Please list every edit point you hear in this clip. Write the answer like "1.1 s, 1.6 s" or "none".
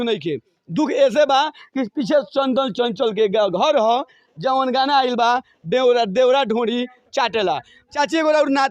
7.8 s